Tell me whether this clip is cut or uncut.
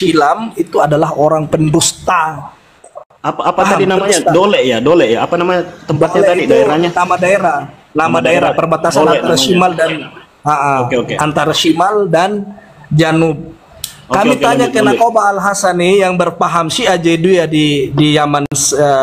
uncut